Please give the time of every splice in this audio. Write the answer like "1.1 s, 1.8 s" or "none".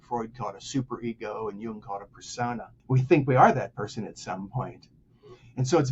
2.7 s